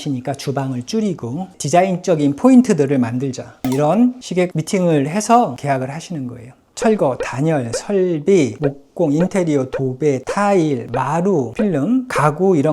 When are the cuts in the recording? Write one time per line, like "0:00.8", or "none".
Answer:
0:01.5
0:06.7